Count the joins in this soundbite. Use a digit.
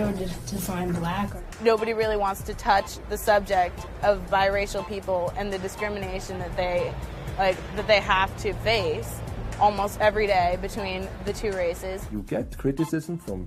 1